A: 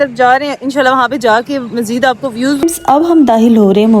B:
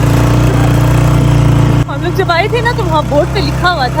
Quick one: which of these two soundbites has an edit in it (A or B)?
A